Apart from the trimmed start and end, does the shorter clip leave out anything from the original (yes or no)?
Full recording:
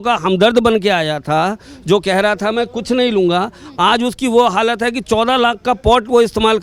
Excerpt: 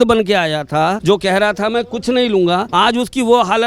yes